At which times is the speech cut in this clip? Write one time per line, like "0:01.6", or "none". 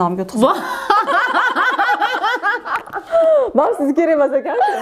none